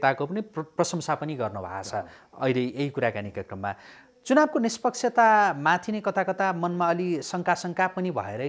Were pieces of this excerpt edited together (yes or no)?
no